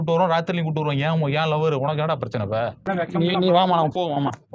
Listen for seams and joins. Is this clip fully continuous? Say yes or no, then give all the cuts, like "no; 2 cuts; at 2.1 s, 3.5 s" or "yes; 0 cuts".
no; 1 cut; at 2.8 s